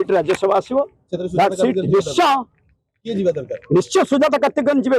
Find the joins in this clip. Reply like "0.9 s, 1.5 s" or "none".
none